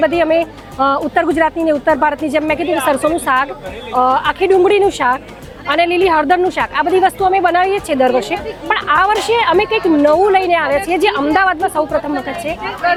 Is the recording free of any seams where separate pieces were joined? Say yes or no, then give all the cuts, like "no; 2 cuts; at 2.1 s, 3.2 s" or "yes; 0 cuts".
yes; 0 cuts